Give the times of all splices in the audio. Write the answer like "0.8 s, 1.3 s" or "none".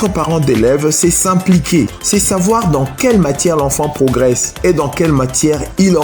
2.0 s